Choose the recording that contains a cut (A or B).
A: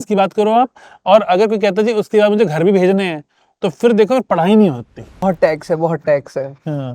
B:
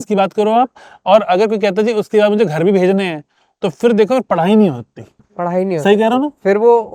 A